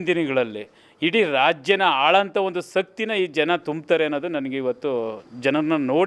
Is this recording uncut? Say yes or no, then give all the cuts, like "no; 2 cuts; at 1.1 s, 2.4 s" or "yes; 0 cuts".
yes; 0 cuts